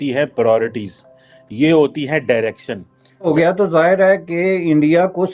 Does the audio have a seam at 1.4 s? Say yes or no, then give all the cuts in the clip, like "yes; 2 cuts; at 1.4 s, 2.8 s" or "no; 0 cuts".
no; 1 cut; at 3.3 s